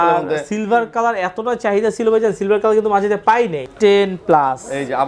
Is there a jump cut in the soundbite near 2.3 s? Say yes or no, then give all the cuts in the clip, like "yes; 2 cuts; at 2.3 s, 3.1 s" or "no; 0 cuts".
no; 1 cut; at 3.6 s